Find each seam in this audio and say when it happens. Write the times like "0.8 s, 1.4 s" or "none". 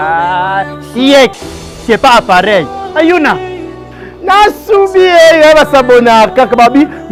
none